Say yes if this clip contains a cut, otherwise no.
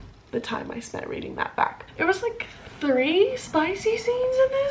yes